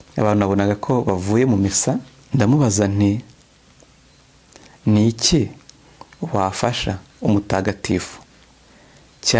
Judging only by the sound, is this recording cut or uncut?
cut